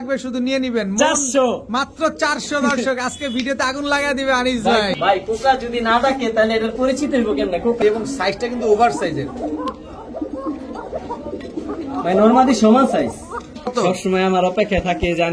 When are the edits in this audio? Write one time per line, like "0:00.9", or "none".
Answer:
0:04.9
0:07.8
0:13.7